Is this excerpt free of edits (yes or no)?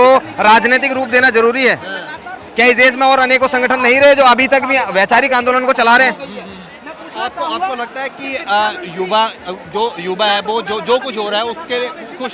yes